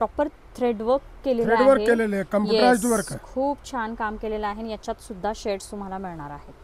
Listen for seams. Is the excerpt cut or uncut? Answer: uncut